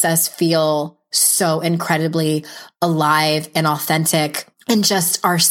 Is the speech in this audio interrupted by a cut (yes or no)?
yes